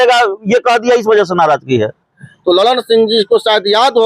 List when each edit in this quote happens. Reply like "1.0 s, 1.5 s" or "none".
2.1 s